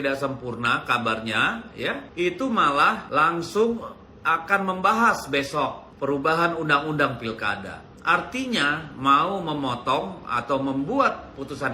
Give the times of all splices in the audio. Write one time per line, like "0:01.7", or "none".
0:02.1
0:03.0
0:05.8